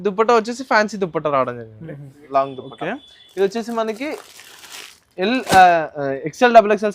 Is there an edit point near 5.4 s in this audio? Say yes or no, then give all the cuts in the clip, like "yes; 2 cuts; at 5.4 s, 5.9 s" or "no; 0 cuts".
no; 1 cut; at 2.2 s